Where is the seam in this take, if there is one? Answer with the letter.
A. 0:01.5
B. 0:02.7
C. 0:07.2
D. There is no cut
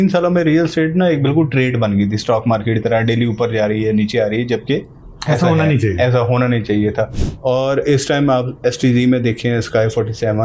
C